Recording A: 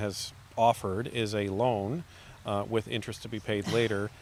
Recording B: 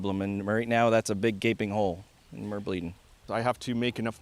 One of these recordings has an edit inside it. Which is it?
B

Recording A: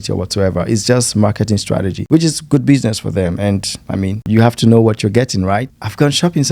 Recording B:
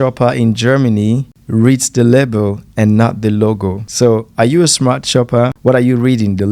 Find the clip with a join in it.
A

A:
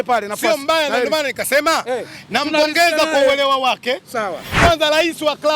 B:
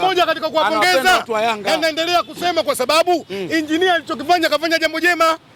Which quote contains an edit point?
A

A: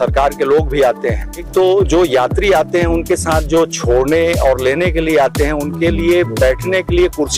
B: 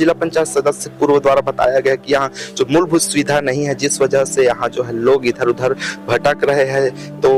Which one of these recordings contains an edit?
A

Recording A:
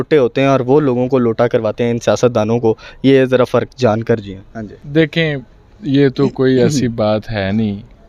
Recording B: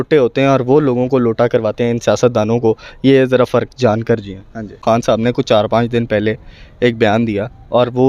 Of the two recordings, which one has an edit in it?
B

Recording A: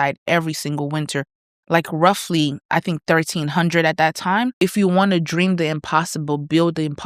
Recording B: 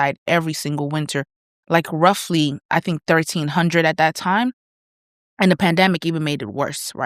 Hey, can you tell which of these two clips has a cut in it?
A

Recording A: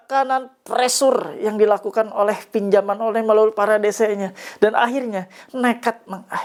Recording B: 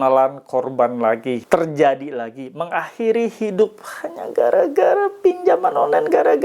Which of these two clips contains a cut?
B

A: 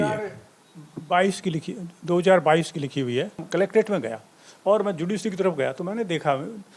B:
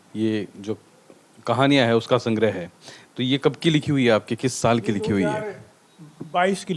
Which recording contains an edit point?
A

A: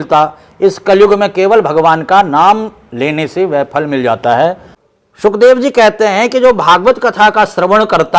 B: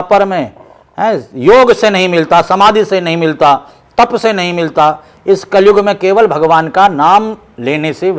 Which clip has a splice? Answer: A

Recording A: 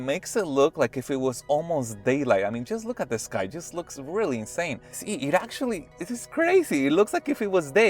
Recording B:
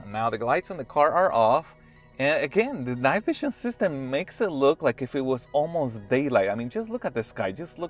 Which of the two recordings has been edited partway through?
A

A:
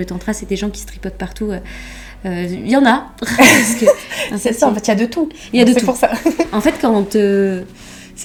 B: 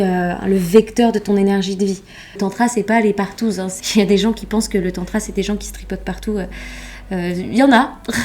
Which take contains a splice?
B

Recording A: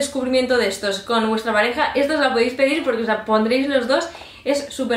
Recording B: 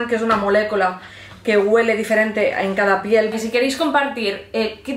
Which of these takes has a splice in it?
B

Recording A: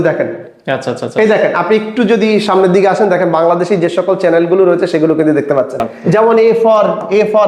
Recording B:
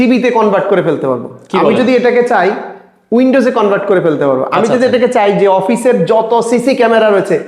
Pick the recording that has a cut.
A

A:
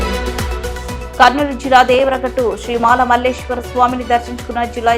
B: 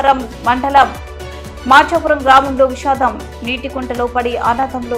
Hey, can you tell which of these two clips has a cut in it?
A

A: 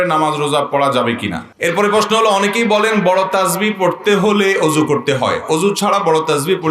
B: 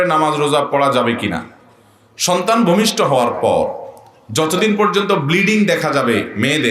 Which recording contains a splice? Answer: A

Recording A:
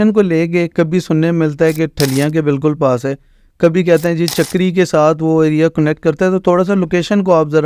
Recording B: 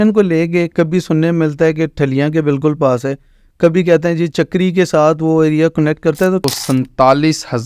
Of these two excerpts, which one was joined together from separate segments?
B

